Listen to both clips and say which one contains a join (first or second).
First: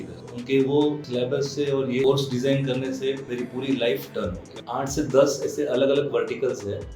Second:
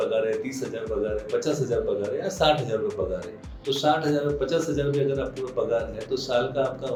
first